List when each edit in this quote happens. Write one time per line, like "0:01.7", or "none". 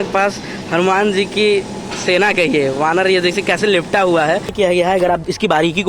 0:04.5